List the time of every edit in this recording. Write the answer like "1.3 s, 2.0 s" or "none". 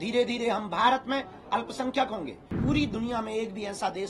2.6 s